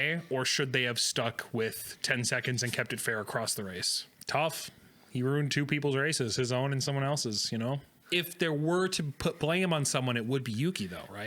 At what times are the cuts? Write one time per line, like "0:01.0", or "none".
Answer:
0:04.1
0:07.9